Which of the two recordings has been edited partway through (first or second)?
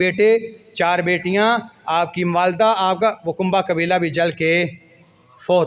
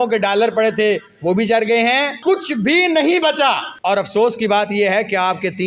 second